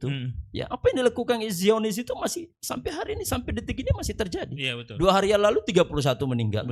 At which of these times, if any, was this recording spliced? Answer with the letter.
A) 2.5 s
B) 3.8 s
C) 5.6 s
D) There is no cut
D